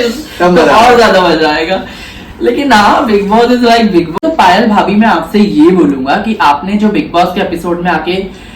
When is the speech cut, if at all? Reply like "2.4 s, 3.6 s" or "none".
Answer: 4.2 s

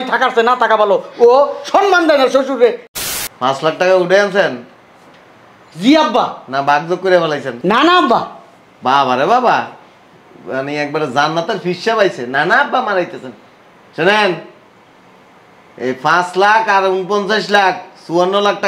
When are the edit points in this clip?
2.9 s

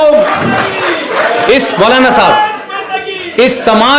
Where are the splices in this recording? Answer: none

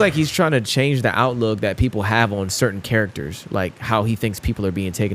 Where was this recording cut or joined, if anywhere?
none

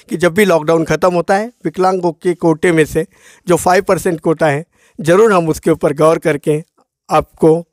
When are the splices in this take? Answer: none

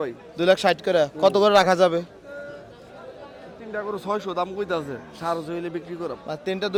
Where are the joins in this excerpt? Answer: none

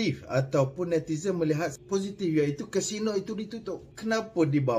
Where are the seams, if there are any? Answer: 1.7 s, 3.9 s

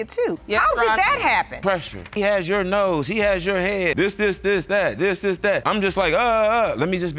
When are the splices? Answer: 2.0 s, 3.9 s, 5.6 s

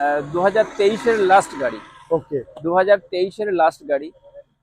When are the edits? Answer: none

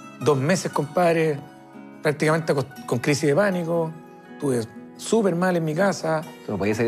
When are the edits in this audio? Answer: none

